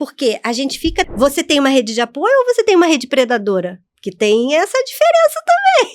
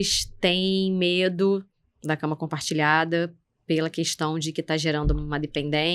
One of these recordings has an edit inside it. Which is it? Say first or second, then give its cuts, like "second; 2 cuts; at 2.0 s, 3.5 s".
first; 1 cut; at 1.1 s